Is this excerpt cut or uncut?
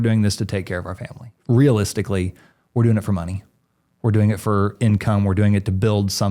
cut